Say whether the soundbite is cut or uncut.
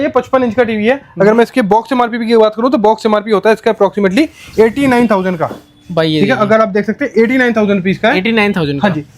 uncut